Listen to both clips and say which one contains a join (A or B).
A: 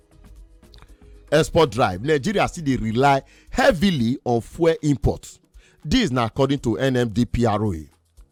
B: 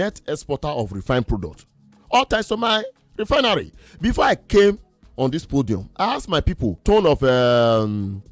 B